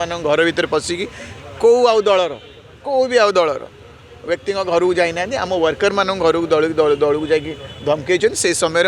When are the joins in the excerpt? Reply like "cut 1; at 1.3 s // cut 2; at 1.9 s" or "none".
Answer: none